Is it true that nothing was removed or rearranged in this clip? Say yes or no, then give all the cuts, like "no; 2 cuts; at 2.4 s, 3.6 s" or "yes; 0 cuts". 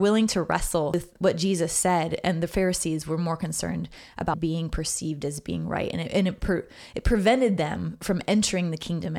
no; 2 cuts; at 0.9 s, 4.3 s